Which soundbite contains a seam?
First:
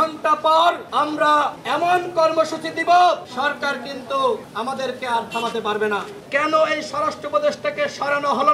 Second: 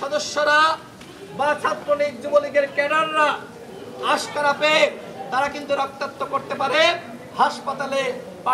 first; 4 cuts; at 1.2 s, 3.3 s, 4.5 s, 6.1 s

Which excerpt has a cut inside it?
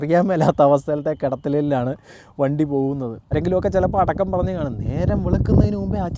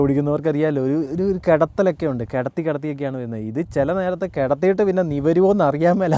first; 1 cut; at 3.3 s

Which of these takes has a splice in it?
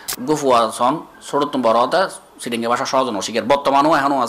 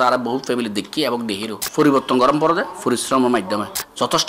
second; 1 cut; at 1.6 s

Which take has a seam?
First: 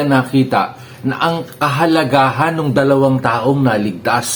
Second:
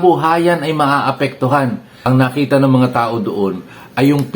second; 1 cut; at 1.9 s

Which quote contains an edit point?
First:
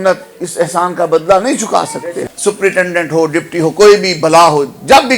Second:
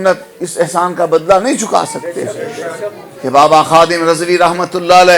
first; 1 cut; at 2.2 s

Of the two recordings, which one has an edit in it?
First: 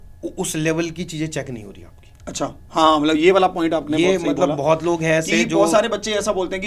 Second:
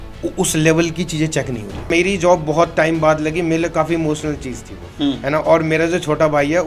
second; 1 cut; at 1.9 s

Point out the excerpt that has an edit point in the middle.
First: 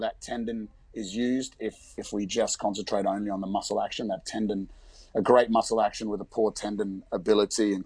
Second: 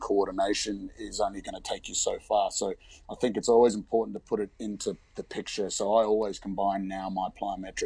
first; 1 cut; at 2.0 s

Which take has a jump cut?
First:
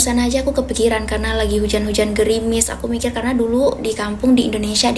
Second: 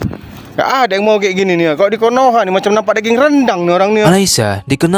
second; 1 cut; at 4.1 s

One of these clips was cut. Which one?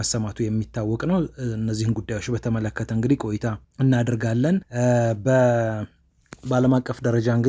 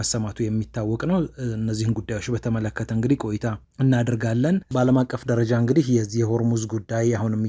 second; 1 cut; at 4.7 s

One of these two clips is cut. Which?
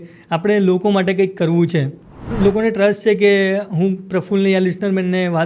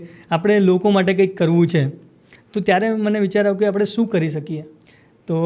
first; 1 cut; at 2.3 s

